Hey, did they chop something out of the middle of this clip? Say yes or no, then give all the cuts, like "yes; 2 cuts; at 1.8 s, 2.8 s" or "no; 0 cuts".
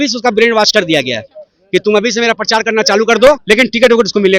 yes; 1 cut; at 3.4 s